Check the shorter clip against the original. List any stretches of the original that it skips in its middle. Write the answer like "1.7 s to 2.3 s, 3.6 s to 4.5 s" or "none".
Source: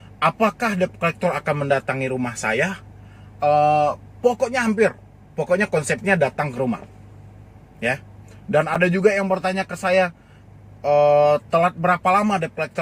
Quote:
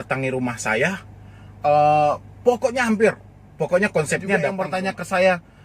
6.3 s to 9.3 s